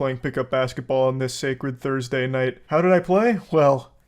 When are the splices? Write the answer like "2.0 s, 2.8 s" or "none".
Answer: 2.6 s